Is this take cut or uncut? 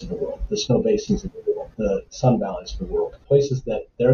cut